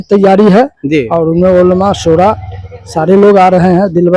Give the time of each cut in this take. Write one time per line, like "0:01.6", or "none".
none